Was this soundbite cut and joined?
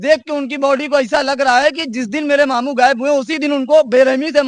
no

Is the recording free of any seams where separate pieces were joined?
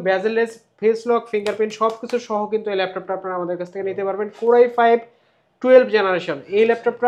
yes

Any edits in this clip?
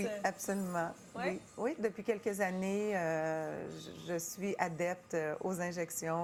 no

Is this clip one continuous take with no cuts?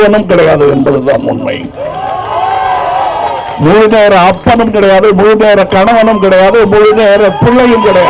yes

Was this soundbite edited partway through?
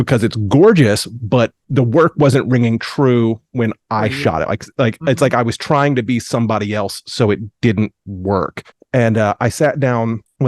no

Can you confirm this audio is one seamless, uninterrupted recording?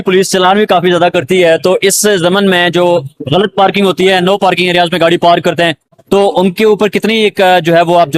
yes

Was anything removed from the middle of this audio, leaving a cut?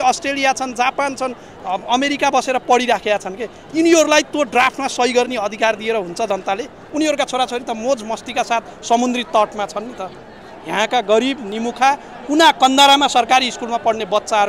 yes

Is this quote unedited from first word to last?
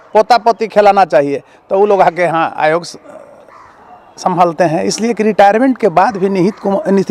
yes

